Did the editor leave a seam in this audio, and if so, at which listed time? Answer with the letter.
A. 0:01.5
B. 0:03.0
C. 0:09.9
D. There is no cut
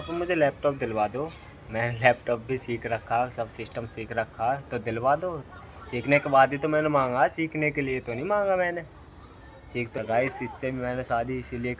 C